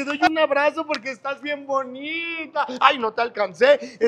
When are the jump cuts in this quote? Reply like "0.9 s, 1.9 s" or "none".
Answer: none